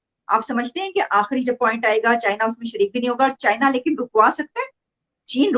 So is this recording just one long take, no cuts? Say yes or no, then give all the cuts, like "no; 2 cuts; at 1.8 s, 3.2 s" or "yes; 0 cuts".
yes; 0 cuts